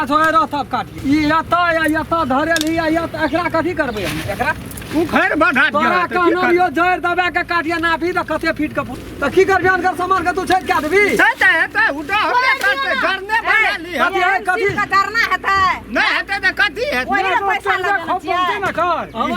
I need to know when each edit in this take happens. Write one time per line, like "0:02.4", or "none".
0:00.9
0:09.0